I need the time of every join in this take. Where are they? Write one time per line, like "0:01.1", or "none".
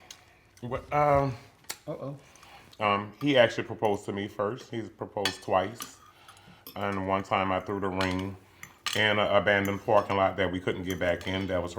0:02.6